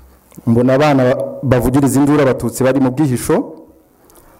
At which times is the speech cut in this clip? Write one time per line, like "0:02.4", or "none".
none